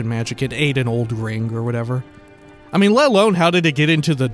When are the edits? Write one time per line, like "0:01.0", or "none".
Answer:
none